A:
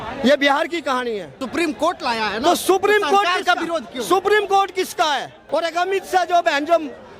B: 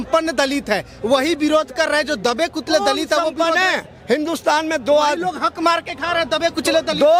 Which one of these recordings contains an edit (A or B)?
A